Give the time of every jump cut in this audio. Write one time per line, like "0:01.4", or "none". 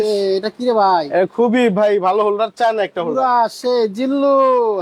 none